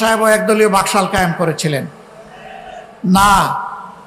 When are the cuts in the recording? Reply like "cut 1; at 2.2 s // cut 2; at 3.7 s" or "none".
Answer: none